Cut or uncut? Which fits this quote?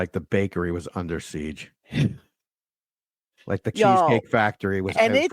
cut